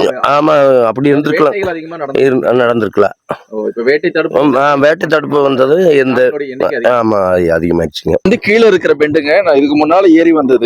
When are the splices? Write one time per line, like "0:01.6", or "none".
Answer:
0:08.3